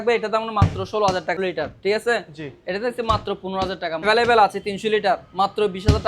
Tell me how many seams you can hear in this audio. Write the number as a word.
two